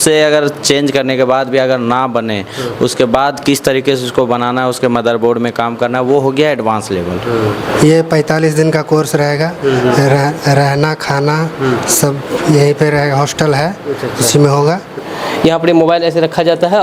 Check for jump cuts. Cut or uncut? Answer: cut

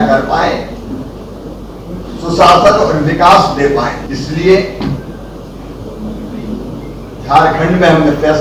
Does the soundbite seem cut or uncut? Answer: cut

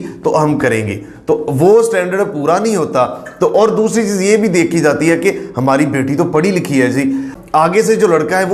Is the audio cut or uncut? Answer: uncut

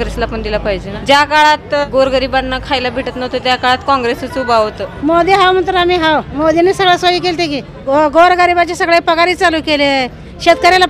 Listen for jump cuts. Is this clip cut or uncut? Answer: cut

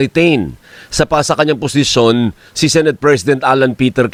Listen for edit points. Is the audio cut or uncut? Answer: uncut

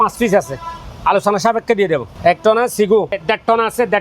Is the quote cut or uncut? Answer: cut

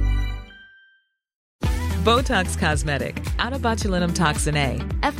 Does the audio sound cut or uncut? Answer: uncut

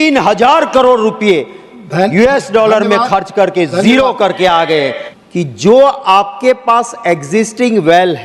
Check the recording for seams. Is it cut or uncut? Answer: cut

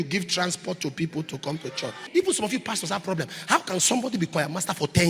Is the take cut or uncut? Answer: cut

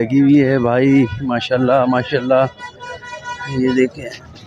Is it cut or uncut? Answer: uncut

